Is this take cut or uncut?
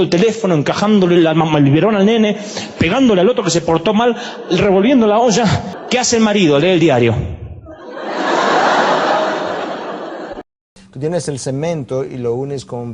cut